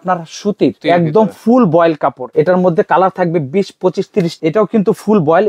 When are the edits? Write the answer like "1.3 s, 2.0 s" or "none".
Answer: 0.8 s, 2.2 s, 4.3 s